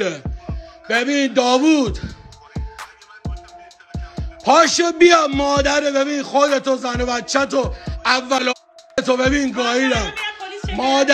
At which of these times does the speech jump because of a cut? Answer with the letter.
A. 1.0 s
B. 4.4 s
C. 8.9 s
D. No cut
D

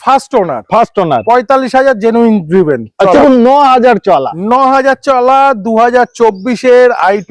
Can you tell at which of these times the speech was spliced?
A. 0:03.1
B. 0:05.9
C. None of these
A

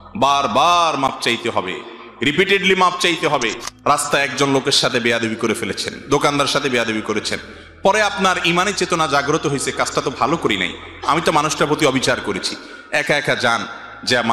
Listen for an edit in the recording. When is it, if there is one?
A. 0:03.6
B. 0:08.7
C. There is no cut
A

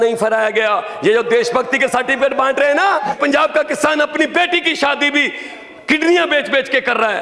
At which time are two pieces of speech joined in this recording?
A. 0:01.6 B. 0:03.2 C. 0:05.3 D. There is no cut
B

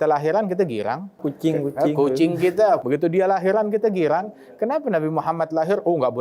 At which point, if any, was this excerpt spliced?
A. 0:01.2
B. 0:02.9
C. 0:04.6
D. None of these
A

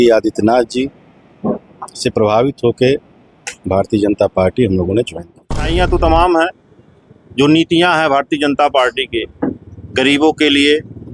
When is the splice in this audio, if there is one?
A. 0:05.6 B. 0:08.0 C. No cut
A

